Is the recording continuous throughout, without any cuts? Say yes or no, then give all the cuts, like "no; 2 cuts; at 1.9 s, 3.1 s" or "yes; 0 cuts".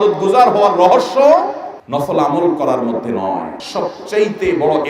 no; 1 cut; at 3.6 s